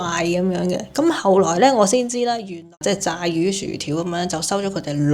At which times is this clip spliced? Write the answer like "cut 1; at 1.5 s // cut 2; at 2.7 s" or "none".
cut 1; at 2.6 s